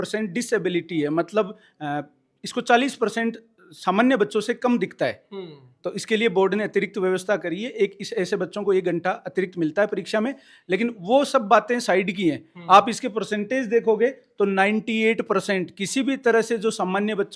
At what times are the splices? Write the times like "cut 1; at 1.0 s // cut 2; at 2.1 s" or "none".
none